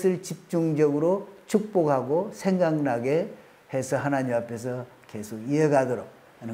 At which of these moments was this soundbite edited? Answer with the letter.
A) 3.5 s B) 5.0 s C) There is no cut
C